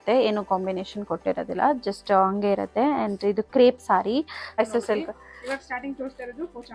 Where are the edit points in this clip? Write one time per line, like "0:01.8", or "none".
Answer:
0:04.6